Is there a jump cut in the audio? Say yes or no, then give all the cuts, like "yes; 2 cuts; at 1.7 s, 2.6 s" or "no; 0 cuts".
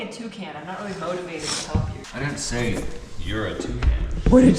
yes; 1 cut; at 2.0 s